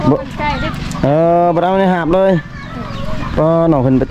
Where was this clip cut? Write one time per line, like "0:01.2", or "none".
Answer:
none